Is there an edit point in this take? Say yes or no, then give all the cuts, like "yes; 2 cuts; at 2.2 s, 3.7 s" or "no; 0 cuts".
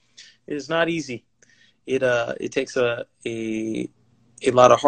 no; 0 cuts